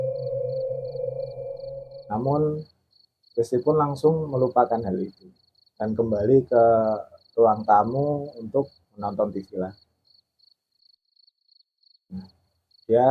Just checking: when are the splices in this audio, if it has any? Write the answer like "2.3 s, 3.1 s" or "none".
none